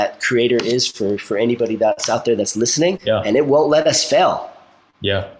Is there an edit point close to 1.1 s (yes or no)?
no